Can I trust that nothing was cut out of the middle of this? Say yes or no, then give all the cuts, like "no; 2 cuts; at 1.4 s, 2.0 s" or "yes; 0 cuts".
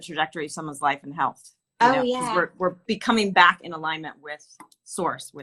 yes; 0 cuts